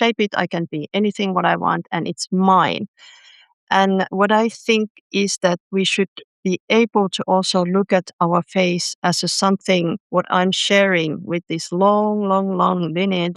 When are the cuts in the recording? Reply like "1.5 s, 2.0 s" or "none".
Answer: none